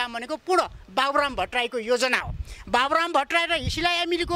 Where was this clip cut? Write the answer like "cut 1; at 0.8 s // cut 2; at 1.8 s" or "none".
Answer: none